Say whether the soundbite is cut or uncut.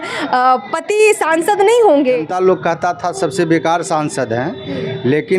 cut